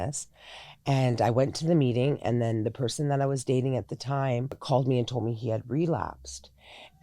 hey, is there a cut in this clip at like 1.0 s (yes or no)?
no